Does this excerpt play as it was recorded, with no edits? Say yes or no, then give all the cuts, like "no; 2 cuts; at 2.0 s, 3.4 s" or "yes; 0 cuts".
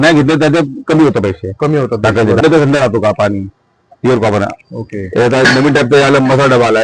no; 1 cut; at 2.4 s